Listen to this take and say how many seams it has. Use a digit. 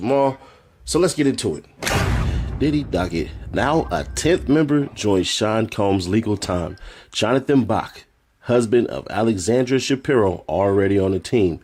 0